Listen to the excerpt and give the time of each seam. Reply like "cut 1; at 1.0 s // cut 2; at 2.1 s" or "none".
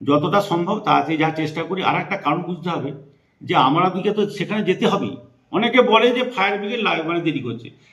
none